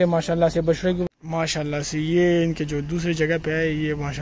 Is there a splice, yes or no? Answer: yes